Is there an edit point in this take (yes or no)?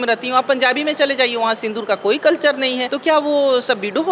yes